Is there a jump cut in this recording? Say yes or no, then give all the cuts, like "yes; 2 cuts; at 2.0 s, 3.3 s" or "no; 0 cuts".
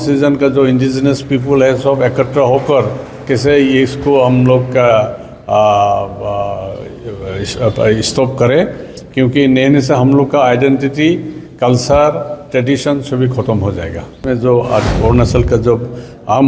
yes; 1 cut; at 14.2 s